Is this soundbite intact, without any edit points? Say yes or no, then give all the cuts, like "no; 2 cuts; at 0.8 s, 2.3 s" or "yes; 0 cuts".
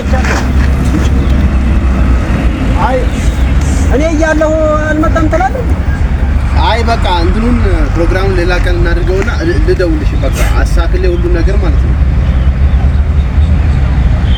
yes; 0 cuts